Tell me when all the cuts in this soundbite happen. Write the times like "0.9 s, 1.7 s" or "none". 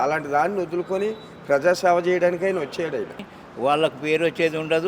3.3 s